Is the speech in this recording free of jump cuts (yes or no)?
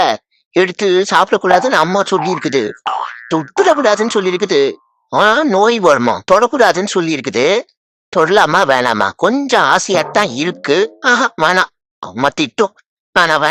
yes